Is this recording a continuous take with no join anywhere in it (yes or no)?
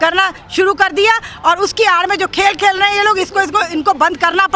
yes